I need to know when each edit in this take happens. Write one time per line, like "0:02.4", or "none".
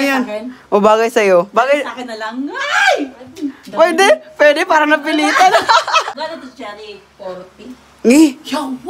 0:06.1